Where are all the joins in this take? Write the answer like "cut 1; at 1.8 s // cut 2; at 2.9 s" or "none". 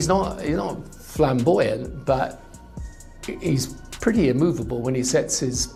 none